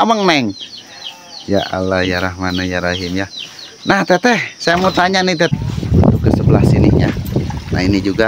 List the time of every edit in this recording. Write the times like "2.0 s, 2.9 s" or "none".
5.5 s